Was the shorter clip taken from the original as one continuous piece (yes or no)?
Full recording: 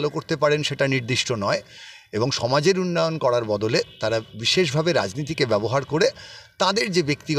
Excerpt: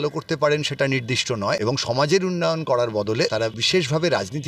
no